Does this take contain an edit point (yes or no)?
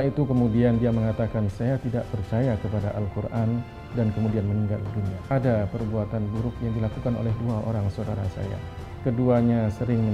yes